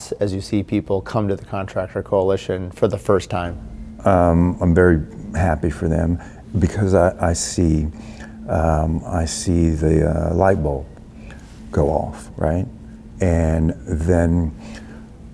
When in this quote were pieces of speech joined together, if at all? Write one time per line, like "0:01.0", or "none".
none